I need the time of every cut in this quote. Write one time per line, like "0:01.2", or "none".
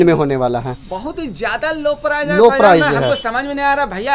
none